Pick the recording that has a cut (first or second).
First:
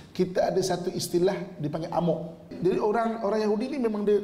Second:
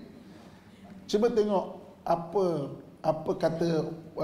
first